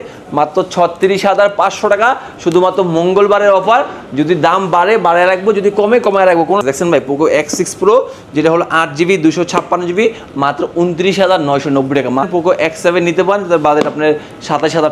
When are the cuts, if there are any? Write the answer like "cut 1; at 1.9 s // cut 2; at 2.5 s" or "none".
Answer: cut 1; at 6.6 s // cut 2; at 12.3 s